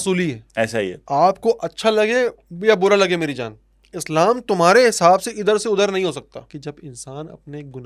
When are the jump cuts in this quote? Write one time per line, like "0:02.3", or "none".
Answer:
0:01.0
0:06.5